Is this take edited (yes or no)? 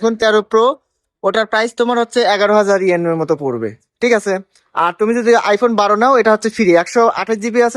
no